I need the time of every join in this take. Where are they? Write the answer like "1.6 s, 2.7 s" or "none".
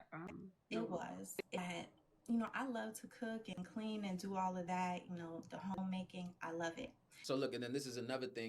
1.6 s, 7.1 s